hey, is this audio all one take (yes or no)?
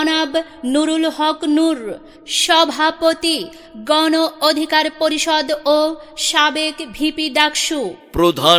yes